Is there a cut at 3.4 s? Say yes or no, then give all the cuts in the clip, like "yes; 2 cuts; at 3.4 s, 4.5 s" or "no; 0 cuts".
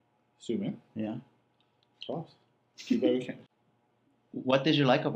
yes; 1 cut; at 3.4 s